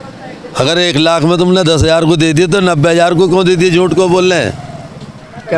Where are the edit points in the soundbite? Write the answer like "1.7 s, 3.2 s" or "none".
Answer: none